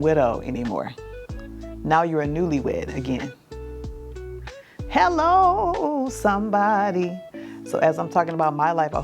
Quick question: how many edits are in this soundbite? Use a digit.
2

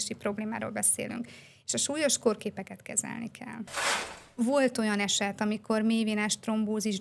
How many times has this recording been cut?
1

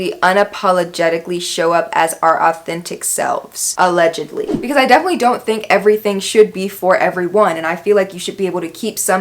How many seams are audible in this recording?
1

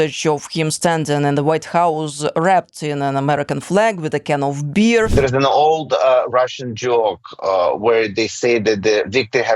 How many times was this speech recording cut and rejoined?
1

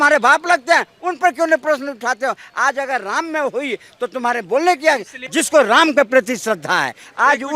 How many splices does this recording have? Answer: 1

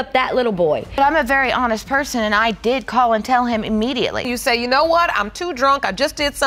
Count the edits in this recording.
1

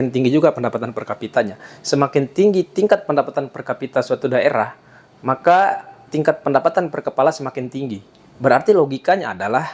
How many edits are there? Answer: 0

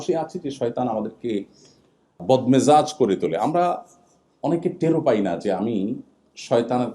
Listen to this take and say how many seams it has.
1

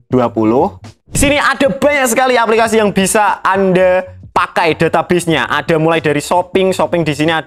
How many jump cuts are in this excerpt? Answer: 1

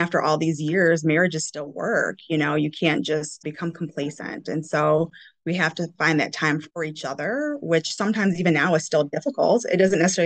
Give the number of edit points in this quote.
2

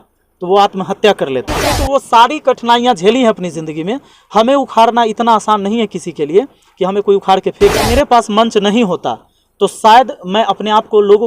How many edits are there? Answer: 2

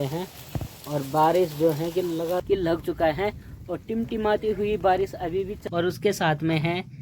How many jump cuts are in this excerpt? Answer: 2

